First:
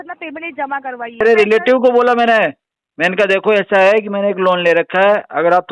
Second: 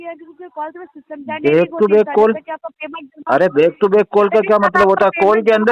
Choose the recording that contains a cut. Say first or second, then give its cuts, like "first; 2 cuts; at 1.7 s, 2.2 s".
first; 1 cut; at 1.2 s